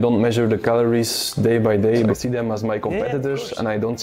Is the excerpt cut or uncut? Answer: cut